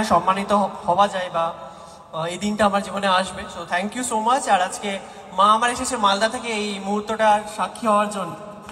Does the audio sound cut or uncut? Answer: uncut